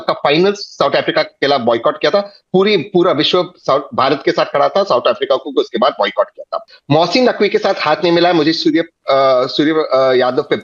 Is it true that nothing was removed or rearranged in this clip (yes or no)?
yes